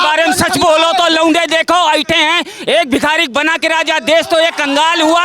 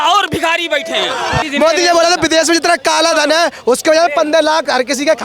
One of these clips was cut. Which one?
second; 1 cut; at 1.4 s

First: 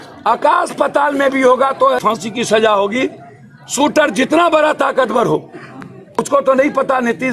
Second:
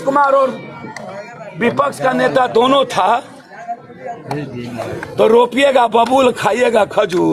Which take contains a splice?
first; 2 cuts; at 2.0 s, 6.2 s

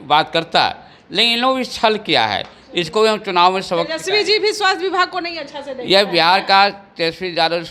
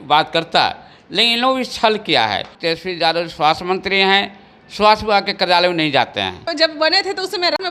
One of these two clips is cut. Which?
second; 2 cuts; at 2.5 s, 6.4 s

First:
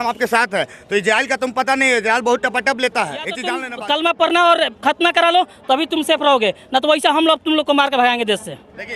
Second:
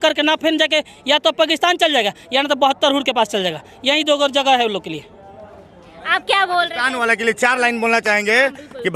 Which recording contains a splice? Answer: first; 1 cut; at 3.6 s

